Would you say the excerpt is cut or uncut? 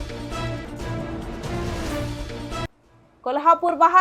cut